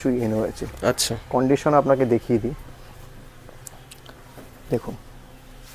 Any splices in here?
no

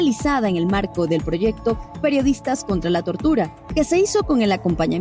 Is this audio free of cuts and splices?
yes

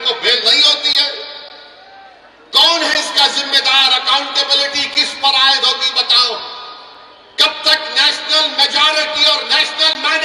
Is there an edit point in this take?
no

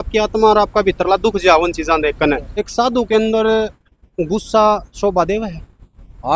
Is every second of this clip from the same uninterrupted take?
no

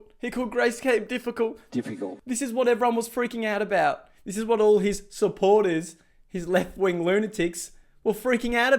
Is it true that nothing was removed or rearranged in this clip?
yes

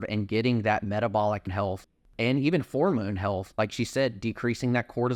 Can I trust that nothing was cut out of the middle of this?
yes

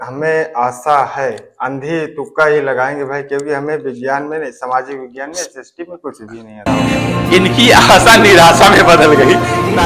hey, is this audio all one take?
no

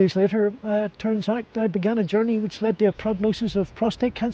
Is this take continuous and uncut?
yes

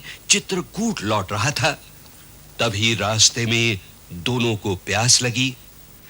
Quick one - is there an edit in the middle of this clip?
no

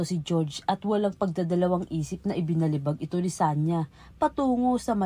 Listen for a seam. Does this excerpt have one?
no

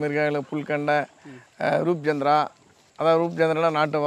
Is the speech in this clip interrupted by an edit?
no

